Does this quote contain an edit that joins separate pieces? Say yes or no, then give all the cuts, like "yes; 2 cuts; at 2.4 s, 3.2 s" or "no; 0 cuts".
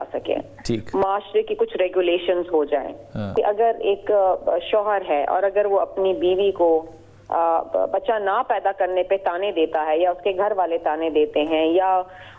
yes; 1 cut; at 3.3 s